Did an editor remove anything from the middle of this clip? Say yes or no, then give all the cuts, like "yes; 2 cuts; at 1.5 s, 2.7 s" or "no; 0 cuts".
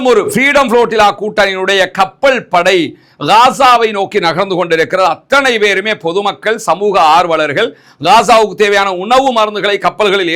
no; 0 cuts